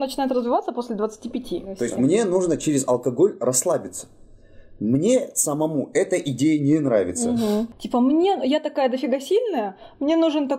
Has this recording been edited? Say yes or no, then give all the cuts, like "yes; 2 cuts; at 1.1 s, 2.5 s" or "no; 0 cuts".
yes; 2 cuts; at 1.8 s, 7.8 s